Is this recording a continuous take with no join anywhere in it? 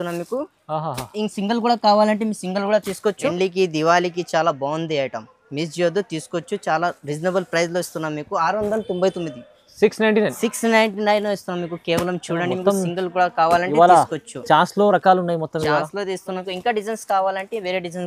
no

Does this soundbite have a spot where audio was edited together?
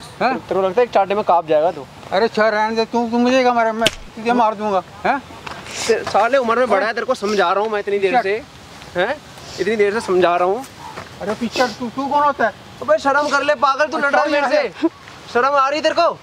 no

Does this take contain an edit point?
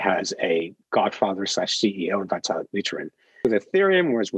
yes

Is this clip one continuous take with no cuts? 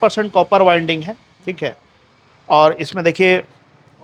yes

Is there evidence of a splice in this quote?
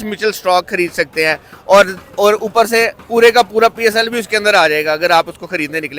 no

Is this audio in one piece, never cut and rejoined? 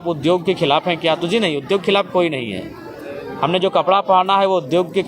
yes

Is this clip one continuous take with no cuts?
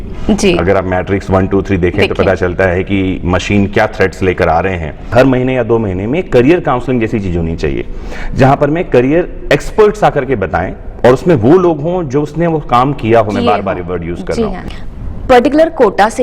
no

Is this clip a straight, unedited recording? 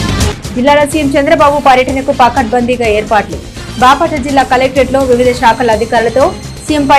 yes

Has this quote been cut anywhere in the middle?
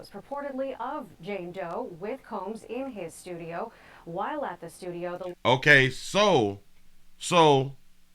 no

